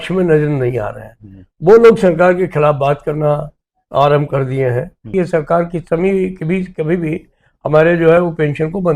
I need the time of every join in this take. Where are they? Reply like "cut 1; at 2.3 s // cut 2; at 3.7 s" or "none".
cut 1; at 5.1 s